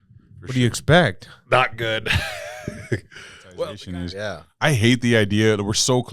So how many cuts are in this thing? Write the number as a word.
one